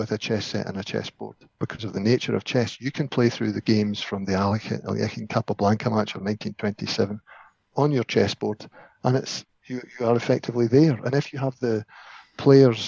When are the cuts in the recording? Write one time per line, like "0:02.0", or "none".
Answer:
0:01.5